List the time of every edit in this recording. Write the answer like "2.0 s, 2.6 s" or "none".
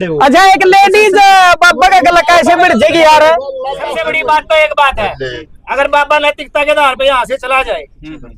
4.0 s